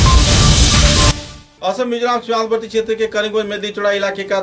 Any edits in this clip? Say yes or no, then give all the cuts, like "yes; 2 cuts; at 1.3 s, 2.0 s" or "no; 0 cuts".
yes; 1 cut; at 1.2 s